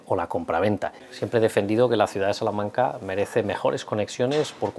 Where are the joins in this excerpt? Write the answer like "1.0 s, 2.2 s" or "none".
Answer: 1.0 s